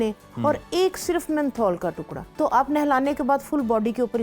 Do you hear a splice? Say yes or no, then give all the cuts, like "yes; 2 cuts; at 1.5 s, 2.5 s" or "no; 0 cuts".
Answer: yes; 1 cut; at 2.2 s